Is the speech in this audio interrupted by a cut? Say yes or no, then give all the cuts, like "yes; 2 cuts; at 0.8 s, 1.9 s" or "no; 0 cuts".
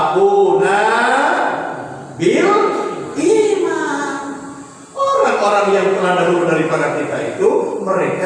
no; 0 cuts